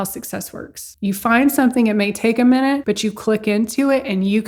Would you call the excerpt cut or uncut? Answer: uncut